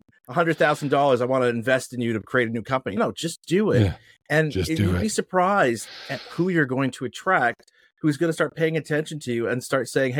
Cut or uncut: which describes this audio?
uncut